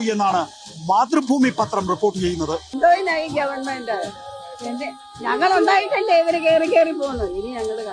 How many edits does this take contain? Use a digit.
1